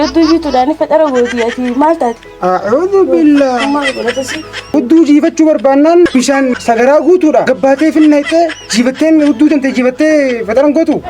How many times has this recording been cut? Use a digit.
3